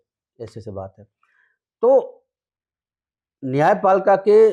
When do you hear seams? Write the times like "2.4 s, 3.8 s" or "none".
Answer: none